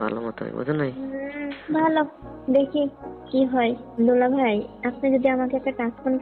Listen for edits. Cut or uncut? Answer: cut